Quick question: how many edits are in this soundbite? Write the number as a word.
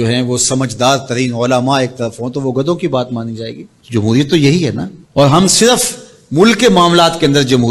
zero